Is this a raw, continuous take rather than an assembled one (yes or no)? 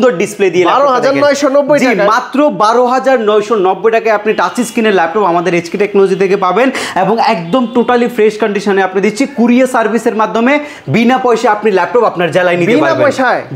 yes